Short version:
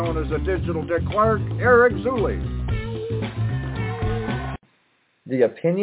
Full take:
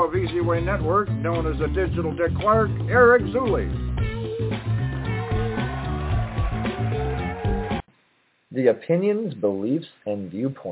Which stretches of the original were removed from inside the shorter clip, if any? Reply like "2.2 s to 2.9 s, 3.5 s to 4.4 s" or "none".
5.9 s to 7.8 s